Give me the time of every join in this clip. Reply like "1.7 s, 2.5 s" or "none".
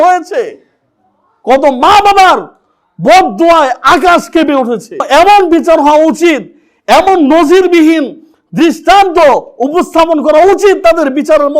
5.1 s